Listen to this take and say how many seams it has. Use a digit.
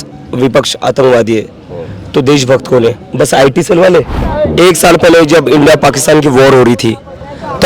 1